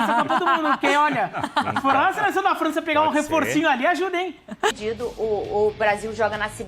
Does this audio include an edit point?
yes; 1 cut; at 4.8 s

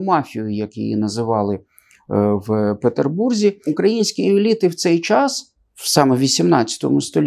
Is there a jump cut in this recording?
yes; 1 cut; at 3.7 s

